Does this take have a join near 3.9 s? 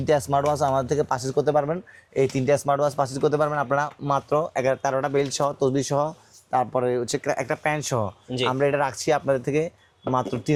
no; 0 cuts

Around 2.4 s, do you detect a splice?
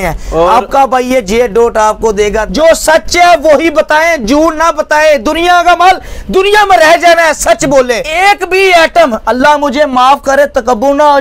yes; 2 cuts; at 2.4 s, 8.1 s

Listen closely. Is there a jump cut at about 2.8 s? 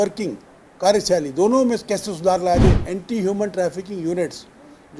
yes; 1 cut; at 2.8 s

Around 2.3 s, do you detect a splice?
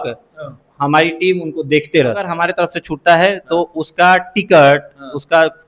yes; 1 cut; at 2.3 s

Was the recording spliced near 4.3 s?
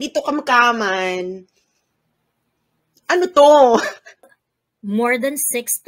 yes; 1 cut; at 4.3 s

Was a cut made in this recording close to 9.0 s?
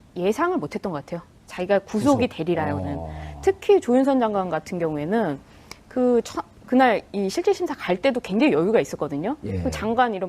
yes; 1 cut; at 9.0 s

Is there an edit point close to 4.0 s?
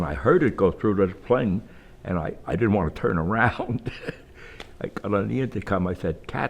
no; 1 cut; at 2.4 s

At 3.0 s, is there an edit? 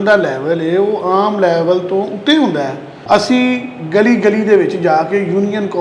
yes; 1 cut; at 3.0 s

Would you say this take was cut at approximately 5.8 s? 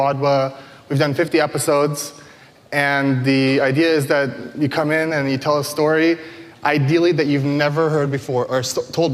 no; 0 cuts

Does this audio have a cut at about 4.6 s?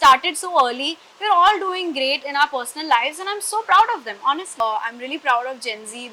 yes; 1 cut; at 4.6 s

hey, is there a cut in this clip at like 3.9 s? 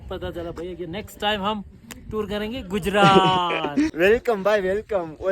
yes; 1 cut; at 3.9 s

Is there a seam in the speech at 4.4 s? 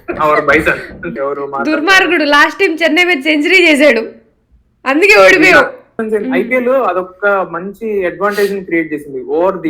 no; 2 cuts; at 1.0 s, 6.0 s

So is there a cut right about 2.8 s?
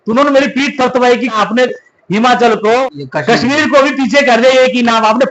yes; 2 cuts; at 1.3 s, 2.8 s

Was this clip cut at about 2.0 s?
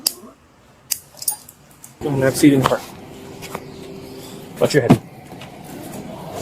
yes; 1 cut; at 2.0 s

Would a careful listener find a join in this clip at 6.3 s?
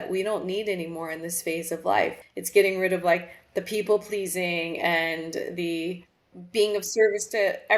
yes; 2 cuts; at 2.1 s, 6.3 s

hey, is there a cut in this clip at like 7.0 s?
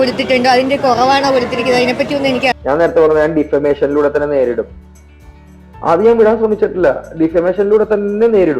no; 1 cut; at 2.5 s

